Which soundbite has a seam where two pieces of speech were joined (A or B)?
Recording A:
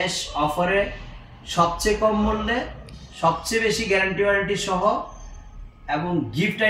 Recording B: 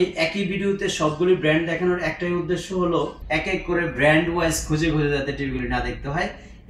B